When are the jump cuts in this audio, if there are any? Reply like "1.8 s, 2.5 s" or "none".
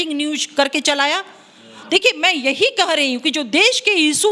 none